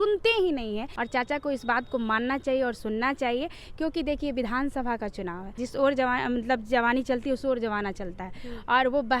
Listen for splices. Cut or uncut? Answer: cut